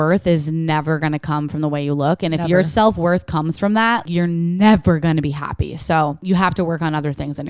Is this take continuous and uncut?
no; 2 cuts; at 4.1 s, 6.2 s

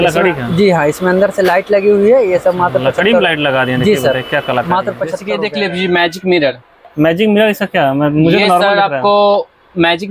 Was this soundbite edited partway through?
yes; 1 cut; at 5.2 s

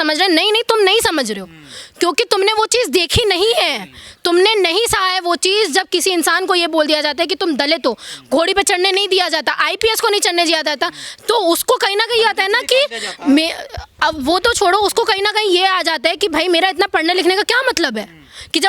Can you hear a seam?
no; 0 cuts

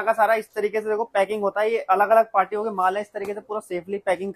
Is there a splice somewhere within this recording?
no; 0 cuts

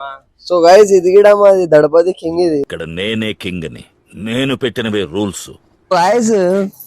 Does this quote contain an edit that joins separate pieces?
yes; 1 cut; at 5.9 s

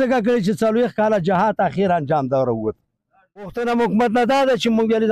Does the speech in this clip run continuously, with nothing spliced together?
no; 1 cut; at 3.6 s

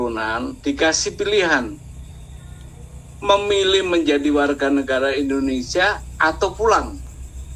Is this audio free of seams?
yes; 0 cuts

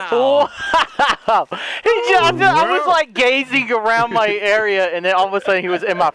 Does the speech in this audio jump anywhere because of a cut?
no; 0 cuts

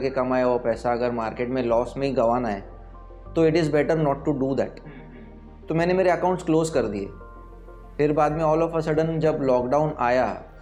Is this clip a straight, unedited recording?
yes; 0 cuts

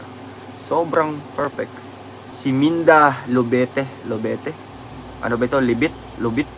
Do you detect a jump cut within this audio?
yes; 1 cut; at 2.3 s

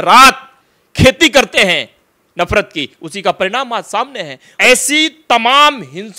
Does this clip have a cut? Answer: yes; 1 cut; at 4.4 s

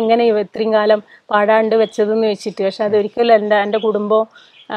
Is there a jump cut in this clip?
no; 0 cuts

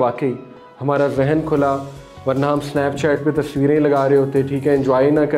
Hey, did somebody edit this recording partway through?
no; 0 cuts

